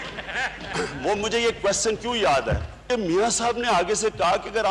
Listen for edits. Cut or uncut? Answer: cut